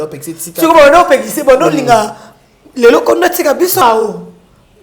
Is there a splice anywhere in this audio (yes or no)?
yes